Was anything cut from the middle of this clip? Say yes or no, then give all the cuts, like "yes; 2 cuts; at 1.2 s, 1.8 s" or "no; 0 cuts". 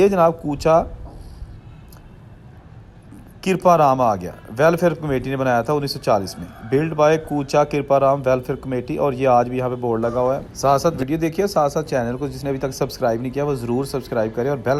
yes; 1 cut; at 10.5 s